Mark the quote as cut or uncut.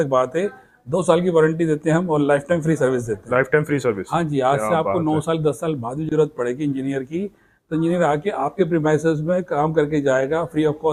uncut